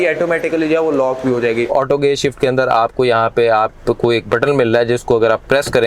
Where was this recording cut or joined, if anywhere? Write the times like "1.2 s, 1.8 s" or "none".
1.7 s